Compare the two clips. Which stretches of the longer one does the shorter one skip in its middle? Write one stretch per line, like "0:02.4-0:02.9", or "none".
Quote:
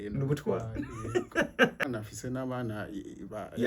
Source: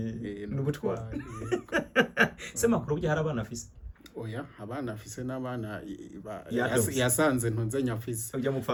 0:02.2-0:04.7